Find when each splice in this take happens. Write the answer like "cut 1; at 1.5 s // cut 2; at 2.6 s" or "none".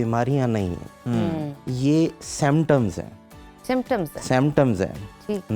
none